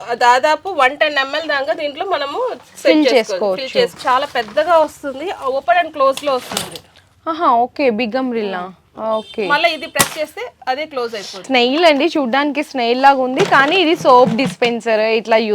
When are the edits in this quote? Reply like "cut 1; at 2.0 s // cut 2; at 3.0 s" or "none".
cut 1; at 4.0 s // cut 2; at 11.4 s